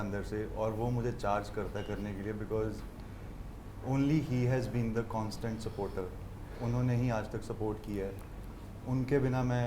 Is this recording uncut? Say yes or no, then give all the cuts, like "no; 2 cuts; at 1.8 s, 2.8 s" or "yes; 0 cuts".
yes; 0 cuts